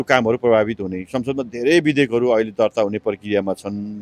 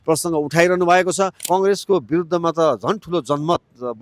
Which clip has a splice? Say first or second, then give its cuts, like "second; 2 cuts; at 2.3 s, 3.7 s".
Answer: second; 1 cut; at 1.4 s